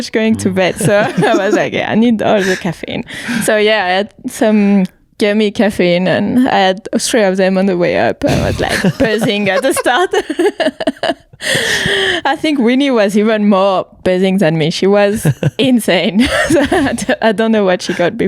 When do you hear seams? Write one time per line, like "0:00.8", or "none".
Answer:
none